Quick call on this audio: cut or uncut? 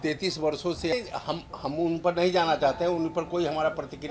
cut